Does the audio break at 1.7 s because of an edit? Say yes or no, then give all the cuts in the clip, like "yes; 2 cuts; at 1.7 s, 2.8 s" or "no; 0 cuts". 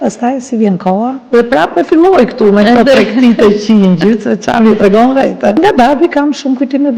no; 1 cut; at 5.6 s